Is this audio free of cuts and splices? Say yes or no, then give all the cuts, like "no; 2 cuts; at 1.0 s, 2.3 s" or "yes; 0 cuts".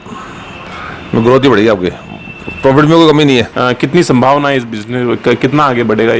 no; 1 cut; at 3.5 s